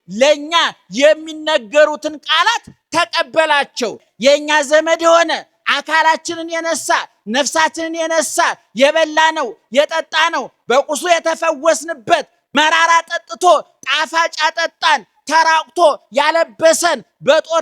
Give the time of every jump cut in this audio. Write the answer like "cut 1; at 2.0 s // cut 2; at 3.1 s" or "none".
cut 1; at 4.1 s // cut 2; at 12.4 s